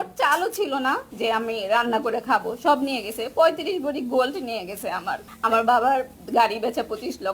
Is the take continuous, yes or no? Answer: no